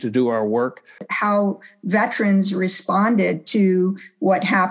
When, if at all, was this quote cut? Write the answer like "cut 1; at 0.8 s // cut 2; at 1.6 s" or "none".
cut 1; at 1.1 s